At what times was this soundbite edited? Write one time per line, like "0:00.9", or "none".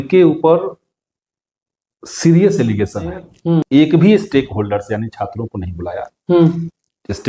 0:03.7